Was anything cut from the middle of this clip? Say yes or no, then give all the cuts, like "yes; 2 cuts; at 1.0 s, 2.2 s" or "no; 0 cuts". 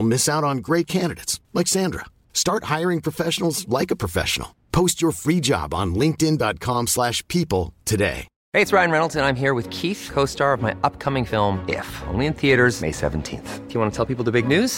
yes; 1 cut; at 8.3 s